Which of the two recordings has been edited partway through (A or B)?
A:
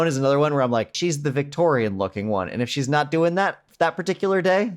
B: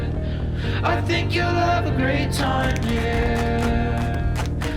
A